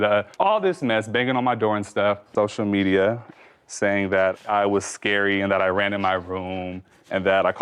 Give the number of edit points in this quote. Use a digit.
1